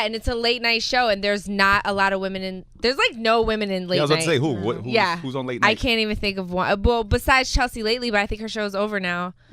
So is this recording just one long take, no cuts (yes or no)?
no